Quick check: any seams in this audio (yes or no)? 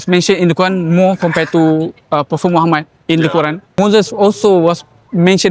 yes